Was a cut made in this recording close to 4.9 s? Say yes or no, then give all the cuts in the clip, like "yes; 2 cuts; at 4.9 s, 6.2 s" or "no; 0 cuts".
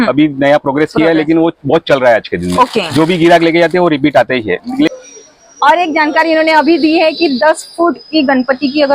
yes; 1 cut; at 4.9 s